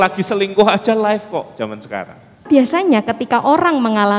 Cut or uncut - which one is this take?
cut